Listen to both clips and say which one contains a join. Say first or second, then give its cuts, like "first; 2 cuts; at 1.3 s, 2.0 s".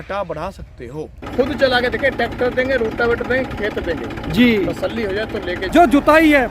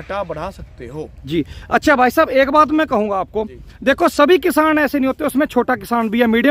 first; 2 cuts; at 1.2 s, 5.6 s